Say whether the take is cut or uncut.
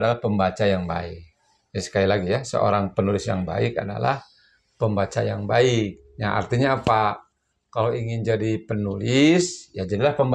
uncut